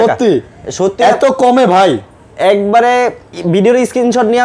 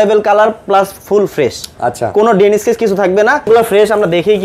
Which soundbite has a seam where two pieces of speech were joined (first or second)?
second